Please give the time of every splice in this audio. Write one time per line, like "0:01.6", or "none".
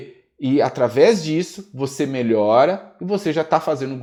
none